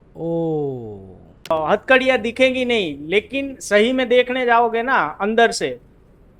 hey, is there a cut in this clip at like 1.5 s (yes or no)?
yes